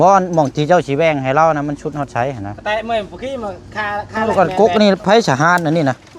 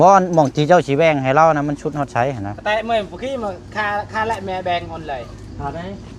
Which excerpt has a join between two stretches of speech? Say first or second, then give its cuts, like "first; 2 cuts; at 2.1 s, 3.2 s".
first; 1 cut; at 4.2 s